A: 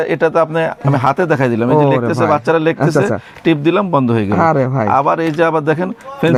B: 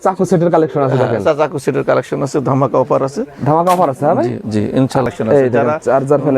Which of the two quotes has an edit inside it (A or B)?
B